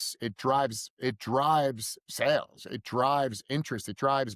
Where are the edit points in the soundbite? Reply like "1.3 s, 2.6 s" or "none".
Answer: none